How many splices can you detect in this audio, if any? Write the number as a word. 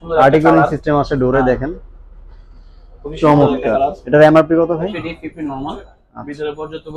one